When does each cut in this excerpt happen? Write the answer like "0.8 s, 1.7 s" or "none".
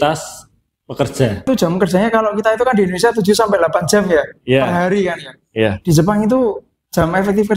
1.5 s